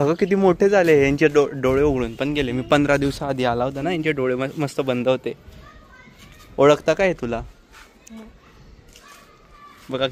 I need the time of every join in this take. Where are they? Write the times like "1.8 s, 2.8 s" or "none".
none